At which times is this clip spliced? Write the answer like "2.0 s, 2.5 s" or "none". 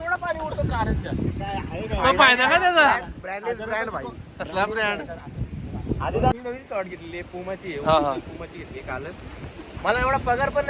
none